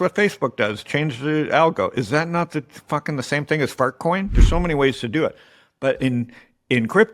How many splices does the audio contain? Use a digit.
1